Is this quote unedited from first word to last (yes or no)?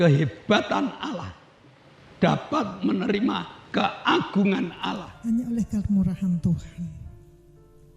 no